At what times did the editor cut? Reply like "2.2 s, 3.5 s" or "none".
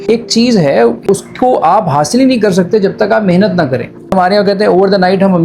1.0 s, 4.1 s